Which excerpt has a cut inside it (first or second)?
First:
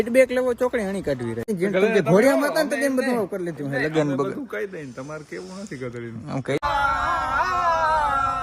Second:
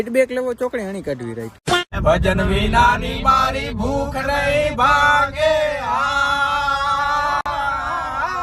first